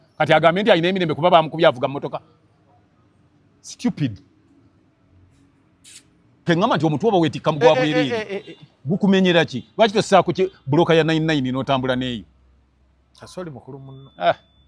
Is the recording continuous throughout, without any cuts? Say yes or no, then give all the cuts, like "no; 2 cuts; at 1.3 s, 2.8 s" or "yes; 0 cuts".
no; 1 cut; at 6.5 s